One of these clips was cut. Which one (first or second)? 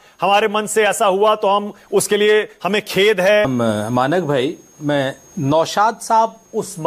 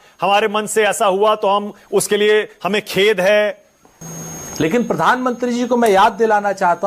second